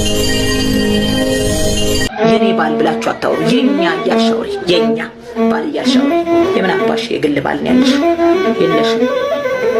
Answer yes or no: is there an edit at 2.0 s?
yes